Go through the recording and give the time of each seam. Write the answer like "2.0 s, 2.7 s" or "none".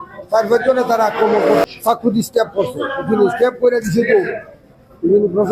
1.6 s